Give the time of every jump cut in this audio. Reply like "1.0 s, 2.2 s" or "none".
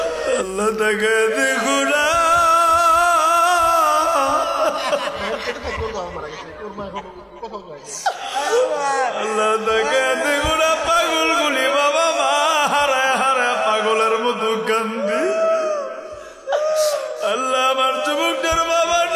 none